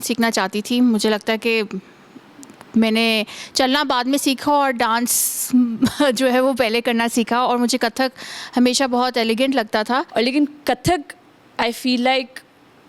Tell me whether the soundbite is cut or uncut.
cut